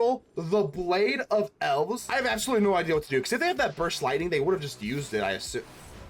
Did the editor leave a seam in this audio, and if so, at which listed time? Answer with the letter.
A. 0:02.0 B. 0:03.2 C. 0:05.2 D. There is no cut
A